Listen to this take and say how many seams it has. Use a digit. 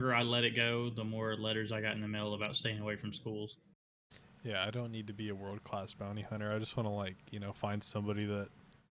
1